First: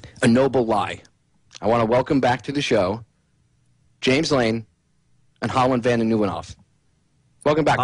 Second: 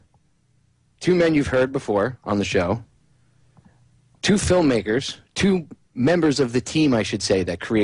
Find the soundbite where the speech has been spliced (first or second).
first